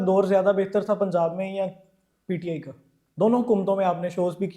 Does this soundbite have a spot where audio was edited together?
no; 0 cuts

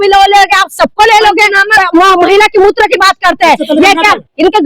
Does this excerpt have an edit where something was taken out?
yes; 1 cut; at 1.7 s

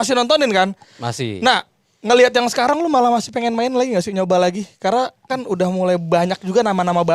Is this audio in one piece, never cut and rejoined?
yes; 0 cuts

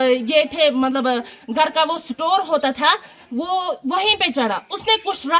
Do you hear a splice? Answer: no; 0 cuts

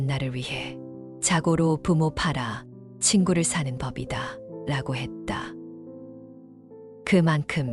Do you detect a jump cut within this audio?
no; 0 cuts

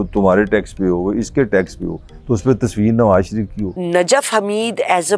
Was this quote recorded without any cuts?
no; 1 cut; at 3.7 s

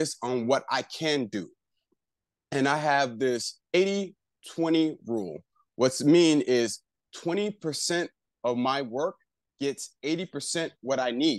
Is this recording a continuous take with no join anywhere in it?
yes; 0 cuts

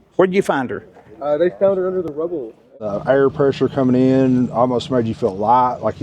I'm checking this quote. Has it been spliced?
yes; 1 cut; at 2.9 s

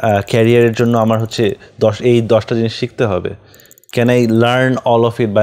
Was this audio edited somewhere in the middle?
no; 0 cuts

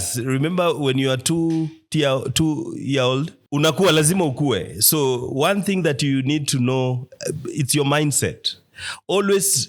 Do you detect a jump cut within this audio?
yes; 1 cut; at 3.4 s

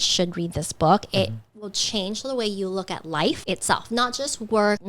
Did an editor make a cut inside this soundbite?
no; 0 cuts

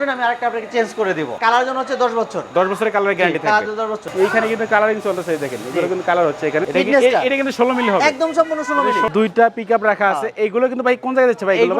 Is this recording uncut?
no; 4 cuts; at 1.4 s, 4.0 s, 6.7 s, 9.1 s

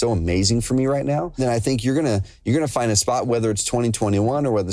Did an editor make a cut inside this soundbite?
yes; 1 cut; at 1.4 s

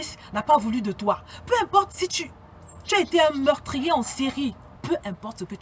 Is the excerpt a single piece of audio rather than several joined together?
no; 1 cut; at 4.7 s

